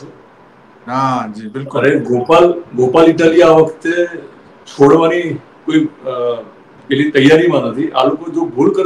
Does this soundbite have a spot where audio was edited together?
no; 0 cuts

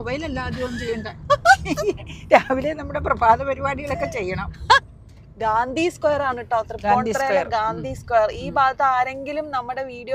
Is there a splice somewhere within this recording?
yes; 1 cut; at 4.9 s

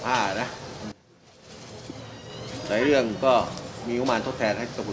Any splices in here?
no; 0 cuts

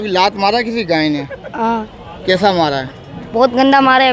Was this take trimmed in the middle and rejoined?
no; 0 cuts

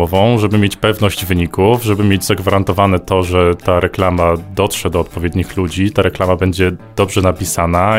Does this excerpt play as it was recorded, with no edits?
yes; 0 cuts

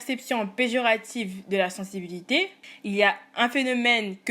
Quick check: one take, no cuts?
no; 1 cut; at 2.7 s

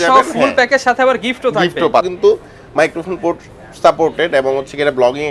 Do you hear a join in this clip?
yes; 1 cut; at 2.1 s

